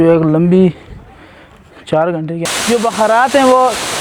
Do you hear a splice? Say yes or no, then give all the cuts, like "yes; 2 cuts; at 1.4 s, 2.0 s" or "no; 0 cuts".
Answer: yes; 1 cut; at 2.4 s